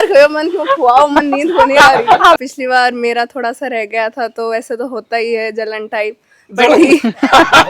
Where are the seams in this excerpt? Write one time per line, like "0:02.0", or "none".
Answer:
0:02.4